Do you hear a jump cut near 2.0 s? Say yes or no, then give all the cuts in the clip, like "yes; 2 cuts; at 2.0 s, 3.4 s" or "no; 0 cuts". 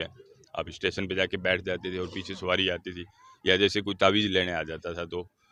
no; 0 cuts